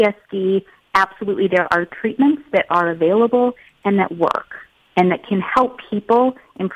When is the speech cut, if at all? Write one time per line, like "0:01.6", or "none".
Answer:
none